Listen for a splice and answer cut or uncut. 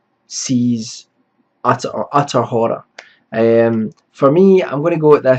uncut